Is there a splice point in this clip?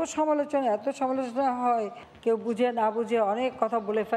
yes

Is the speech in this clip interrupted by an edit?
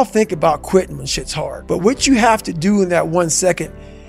yes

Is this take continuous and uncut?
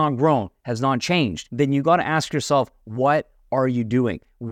no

